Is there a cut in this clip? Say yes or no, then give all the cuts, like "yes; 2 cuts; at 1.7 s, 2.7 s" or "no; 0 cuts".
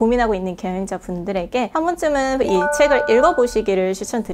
yes; 1 cut; at 1.7 s